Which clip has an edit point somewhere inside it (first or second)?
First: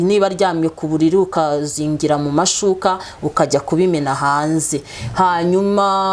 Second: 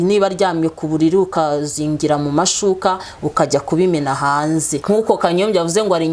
second